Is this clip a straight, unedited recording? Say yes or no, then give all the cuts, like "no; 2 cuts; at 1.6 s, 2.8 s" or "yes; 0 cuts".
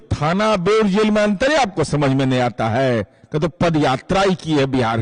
yes; 0 cuts